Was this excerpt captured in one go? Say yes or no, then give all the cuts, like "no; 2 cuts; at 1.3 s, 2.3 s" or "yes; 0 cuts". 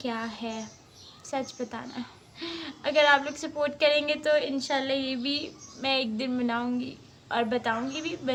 yes; 0 cuts